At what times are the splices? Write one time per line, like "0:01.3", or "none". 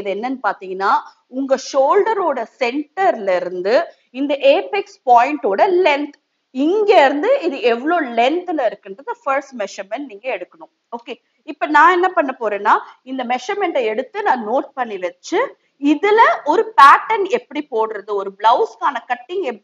none